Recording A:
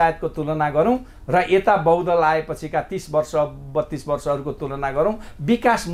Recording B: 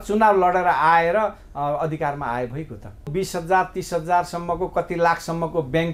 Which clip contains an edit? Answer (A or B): B